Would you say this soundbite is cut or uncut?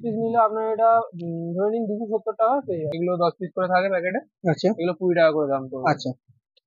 cut